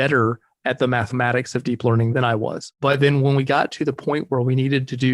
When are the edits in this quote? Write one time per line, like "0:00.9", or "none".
0:02.2